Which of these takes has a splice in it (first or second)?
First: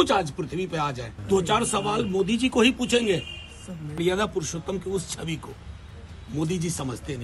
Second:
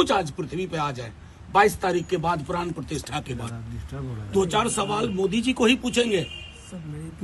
first